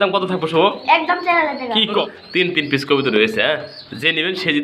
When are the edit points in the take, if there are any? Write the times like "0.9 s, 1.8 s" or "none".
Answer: 2.0 s